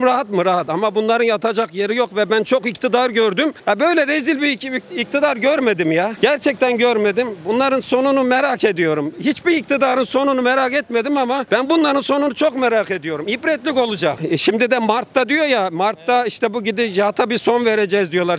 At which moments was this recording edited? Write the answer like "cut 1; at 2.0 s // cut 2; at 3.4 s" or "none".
cut 1; at 3.6 s // cut 2; at 14.2 s